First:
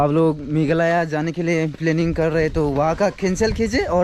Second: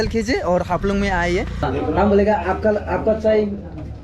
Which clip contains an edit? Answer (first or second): second